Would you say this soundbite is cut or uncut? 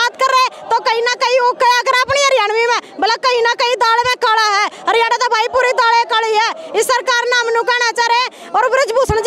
uncut